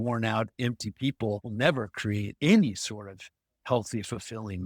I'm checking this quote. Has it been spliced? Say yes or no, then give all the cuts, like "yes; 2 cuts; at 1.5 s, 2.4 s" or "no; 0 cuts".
yes; 2 cuts; at 1.5 s, 2.3 s